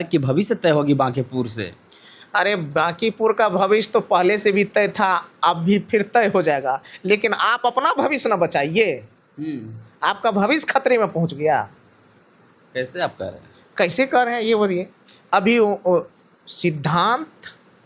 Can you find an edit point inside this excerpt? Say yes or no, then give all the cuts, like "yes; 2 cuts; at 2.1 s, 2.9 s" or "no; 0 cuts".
no; 0 cuts